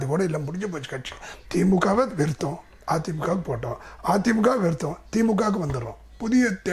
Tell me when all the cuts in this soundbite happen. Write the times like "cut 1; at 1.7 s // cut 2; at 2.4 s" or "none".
cut 1; at 1.3 s